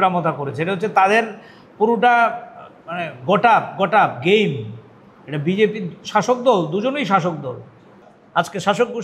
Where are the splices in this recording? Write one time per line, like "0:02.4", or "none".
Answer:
0:08.1